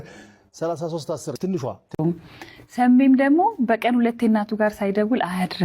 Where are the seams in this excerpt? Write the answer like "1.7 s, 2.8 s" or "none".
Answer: 1.8 s

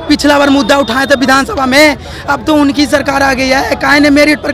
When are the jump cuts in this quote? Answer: none

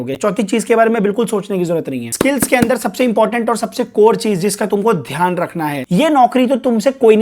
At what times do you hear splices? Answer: 2.1 s, 5.8 s

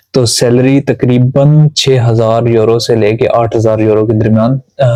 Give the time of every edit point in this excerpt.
none

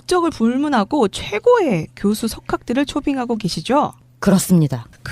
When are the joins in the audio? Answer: 4.1 s

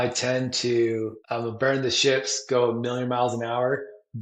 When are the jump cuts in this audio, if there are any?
1.2 s

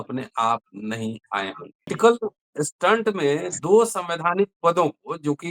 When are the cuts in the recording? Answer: 1.9 s

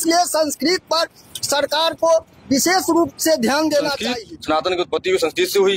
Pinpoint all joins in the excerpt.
4.0 s

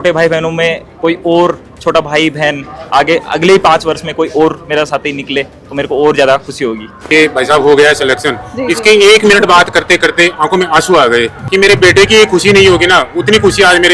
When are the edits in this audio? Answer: 6.9 s, 11.4 s

